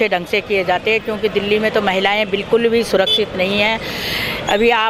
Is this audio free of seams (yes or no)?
yes